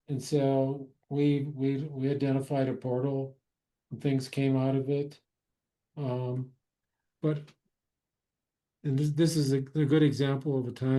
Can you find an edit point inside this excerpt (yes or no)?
no